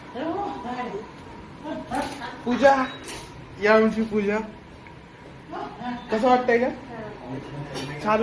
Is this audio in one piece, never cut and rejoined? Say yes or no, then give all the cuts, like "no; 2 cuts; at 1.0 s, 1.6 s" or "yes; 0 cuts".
yes; 0 cuts